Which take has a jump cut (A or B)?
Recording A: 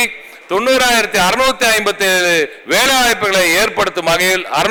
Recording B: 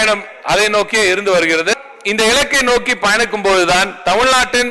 B